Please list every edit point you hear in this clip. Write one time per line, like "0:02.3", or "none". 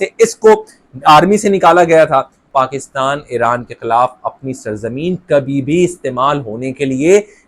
0:02.4